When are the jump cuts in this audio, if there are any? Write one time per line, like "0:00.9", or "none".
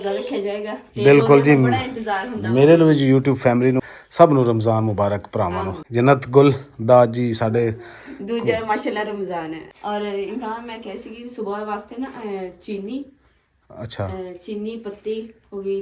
0:03.8
0:05.8
0:09.6